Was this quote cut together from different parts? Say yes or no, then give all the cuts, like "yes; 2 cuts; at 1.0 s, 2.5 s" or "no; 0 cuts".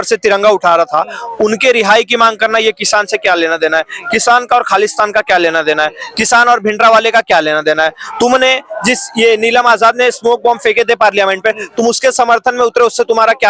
no; 0 cuts